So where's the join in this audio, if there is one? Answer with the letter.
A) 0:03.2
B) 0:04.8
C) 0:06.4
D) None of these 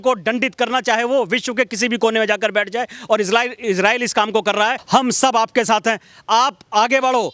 B